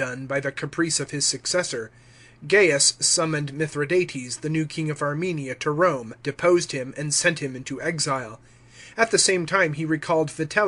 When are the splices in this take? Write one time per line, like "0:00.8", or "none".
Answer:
none